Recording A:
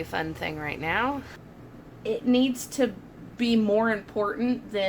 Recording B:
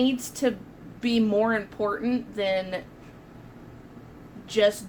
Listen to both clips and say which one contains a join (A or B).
A